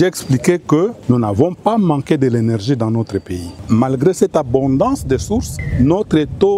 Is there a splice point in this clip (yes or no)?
yes